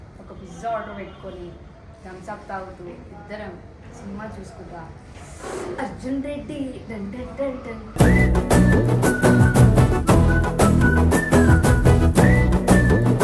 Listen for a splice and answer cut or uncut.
uncut